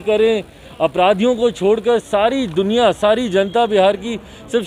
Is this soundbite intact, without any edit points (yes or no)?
yes